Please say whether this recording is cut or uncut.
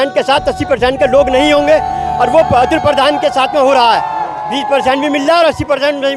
uncut